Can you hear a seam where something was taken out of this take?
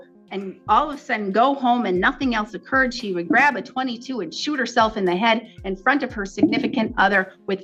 no; 0 cuts

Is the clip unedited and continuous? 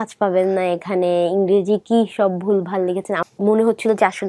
no; 1 cut; at 3.3 s

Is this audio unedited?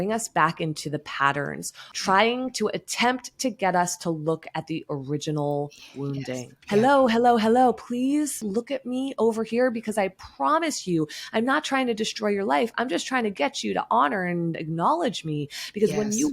no; 3 cuts; at 1.8 s, 6.5 s, 8.4 s

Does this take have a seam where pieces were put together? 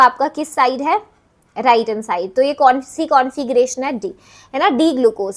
no; 0 cuts

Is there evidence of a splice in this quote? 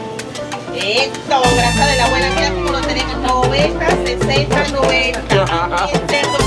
no; 0 cuts

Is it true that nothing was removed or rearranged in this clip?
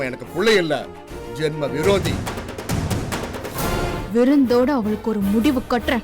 no; 1 cut; at 4.0 s

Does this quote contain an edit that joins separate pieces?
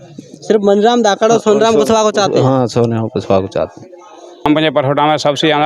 no; 0 cuts

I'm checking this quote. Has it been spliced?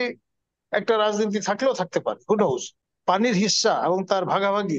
yes; 1 cut; at 2.7 s

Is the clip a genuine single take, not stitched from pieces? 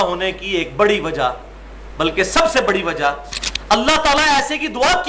no; 1 cut; at 3.3 s

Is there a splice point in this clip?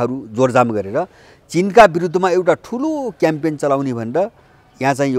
no; 0 cuts

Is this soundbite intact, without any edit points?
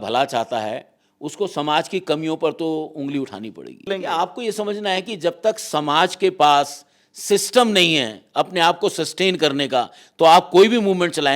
no; 1 cut; at 3.9 s

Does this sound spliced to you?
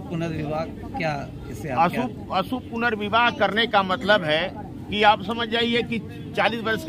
no; 0 cuts

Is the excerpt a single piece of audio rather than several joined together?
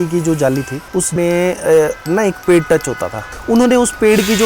no; 2 cuts; at 1.1 s, 3.3 s

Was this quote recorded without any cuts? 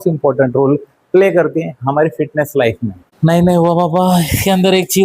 no; 1 cut; at 3.0 s

